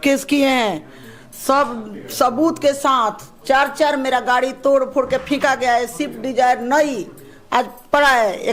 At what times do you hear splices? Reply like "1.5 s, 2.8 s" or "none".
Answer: none